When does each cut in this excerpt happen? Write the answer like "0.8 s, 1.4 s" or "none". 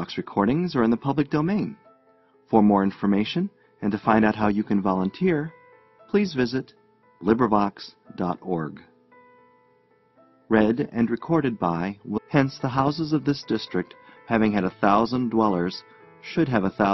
none